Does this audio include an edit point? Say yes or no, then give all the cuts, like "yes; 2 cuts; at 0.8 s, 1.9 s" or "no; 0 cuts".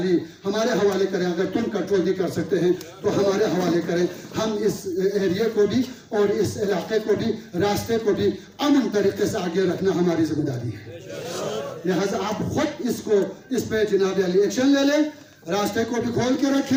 no; 0 cuts